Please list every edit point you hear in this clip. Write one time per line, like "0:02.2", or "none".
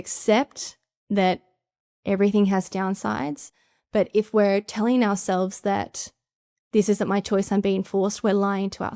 none